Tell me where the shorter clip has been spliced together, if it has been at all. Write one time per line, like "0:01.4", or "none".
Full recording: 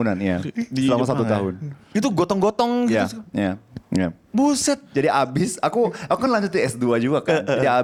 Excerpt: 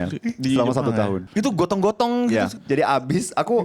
0:01.2
0:02.6